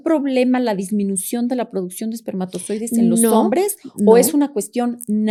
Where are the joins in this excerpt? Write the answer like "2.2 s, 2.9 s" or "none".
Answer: none